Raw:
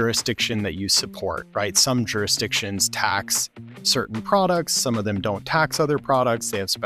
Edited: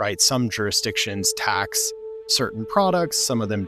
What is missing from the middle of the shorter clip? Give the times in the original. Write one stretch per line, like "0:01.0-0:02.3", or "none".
none